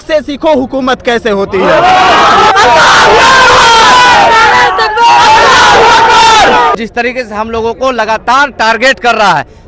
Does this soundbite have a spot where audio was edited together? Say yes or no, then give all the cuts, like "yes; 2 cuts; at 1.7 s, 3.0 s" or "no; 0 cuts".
yes; 2 cuts; at 2.5 s, 6.8 s